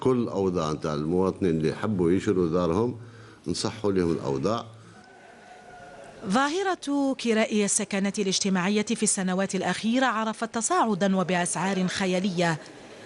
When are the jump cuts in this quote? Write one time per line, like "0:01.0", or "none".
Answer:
0:07.2